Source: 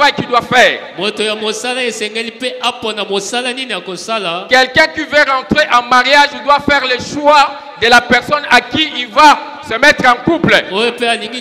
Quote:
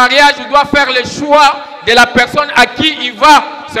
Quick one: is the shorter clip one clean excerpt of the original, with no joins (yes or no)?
yes